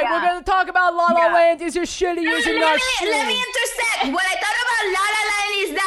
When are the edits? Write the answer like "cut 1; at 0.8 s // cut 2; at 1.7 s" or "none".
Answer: none